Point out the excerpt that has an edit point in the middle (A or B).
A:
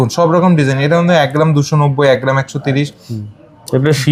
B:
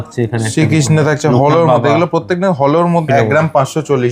B